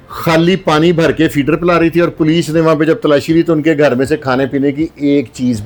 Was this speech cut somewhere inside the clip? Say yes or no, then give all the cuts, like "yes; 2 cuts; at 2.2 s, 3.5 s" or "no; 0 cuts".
no; 0 cuts